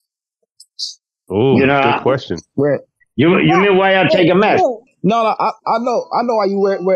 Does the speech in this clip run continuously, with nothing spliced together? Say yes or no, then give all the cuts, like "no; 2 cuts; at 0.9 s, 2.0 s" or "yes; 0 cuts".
no; 1 cut; at 4.9 s